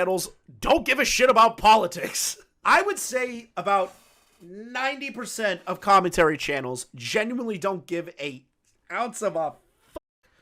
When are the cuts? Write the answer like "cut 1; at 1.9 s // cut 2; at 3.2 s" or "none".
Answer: none